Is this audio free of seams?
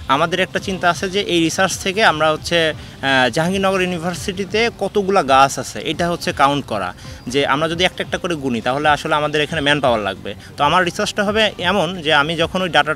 yes; 0 cuts

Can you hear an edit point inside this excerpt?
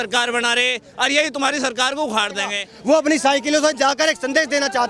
yes; 1 cut; at 2.7 s

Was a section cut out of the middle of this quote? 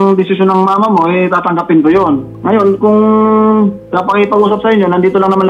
yes; 2 cuts; at 2.3 s, 3.9 s

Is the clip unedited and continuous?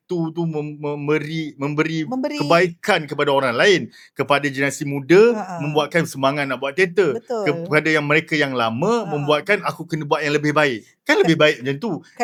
yes; 0 cuts

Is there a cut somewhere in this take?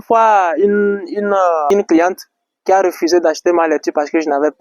yes; 1 cut; at 1.7 s

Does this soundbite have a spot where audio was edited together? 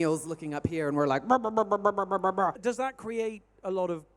yes; 1 cut; at 2.6 s

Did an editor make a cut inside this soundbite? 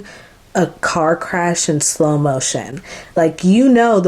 no; 0 cuts

